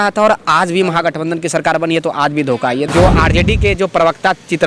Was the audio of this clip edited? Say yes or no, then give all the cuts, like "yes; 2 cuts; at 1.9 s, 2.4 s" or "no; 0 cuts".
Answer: yes; 1 cut; at 2.9 s